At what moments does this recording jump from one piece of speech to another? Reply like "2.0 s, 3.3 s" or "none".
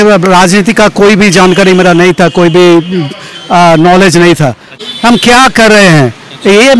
4.8 s